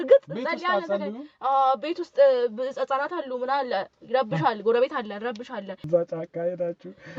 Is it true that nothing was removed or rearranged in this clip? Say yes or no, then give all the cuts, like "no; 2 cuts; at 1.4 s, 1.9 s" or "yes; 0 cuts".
no; 1 cut; at 5.8 s